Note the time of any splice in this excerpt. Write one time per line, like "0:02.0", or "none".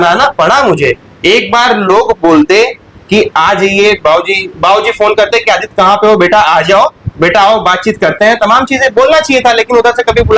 none